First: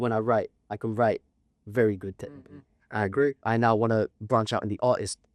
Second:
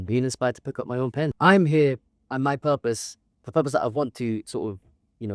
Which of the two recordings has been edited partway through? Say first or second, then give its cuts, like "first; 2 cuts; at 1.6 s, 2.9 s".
second; 1 cut; at 1.3 s